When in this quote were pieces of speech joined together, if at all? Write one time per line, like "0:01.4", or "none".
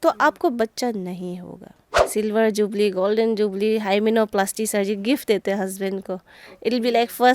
0:01.9

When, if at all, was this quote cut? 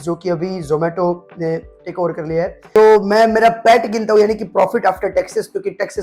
0:02.8

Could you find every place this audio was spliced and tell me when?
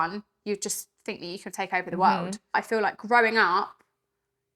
0:02.5

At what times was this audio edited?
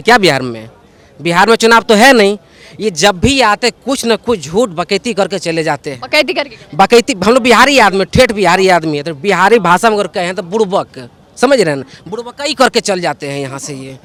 none

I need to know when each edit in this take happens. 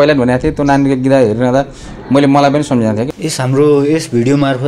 0:03.1

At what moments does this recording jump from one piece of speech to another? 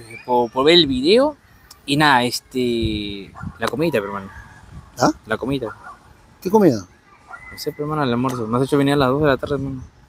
none

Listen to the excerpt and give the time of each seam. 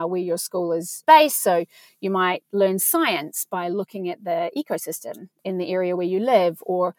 0:01.0
0:05.4

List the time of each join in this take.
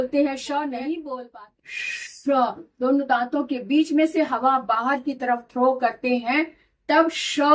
0:01.2

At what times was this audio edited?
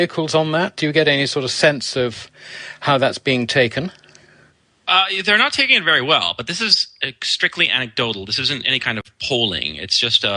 none

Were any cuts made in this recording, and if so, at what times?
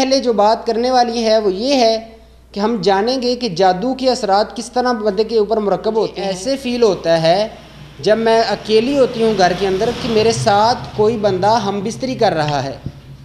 0:06.3

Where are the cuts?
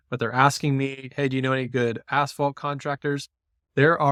none

